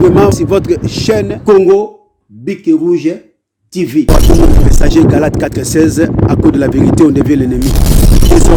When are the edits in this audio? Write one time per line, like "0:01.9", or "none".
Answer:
none